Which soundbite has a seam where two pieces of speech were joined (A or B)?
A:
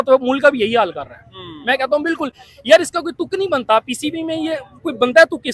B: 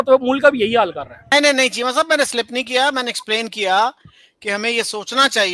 B